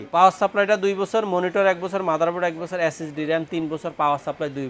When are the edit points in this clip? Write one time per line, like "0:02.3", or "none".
none